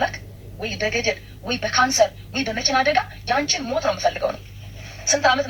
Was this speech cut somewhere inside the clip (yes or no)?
no